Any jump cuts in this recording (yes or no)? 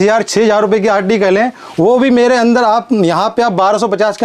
no